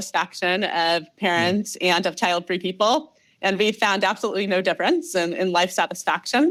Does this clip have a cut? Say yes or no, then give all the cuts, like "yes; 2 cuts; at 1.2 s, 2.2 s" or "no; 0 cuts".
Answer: no; 0 cuts